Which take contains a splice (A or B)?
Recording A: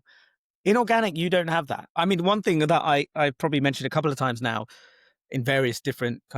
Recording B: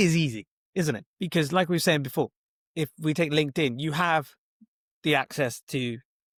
A